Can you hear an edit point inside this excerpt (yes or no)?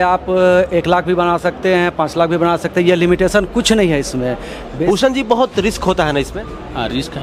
yes